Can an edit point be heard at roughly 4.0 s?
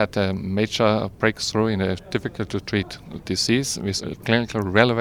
yes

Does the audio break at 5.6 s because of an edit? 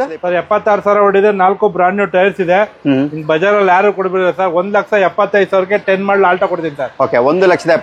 no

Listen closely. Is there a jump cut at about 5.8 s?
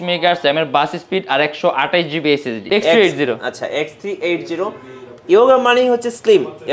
no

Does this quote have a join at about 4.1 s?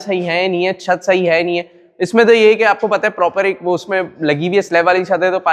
no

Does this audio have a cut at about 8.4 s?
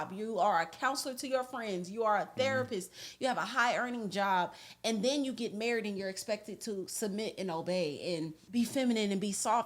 yes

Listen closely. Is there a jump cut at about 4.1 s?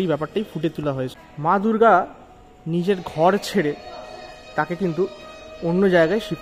no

